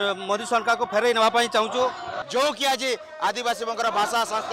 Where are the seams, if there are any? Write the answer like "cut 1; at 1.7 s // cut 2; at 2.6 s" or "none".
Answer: cut 1; at 2.1 s